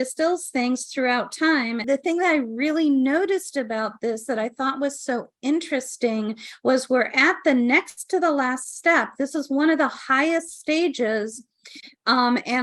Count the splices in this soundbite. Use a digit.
1